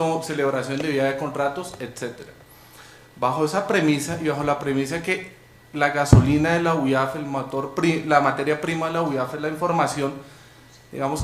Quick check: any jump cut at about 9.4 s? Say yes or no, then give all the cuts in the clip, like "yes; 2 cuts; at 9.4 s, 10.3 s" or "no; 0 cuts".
no; 1 cut; at 3.2 s